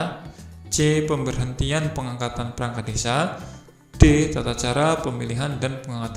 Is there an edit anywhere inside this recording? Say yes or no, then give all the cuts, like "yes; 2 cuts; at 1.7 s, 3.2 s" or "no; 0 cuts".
no; 0 cuts